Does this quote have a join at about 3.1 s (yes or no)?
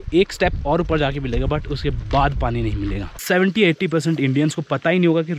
yes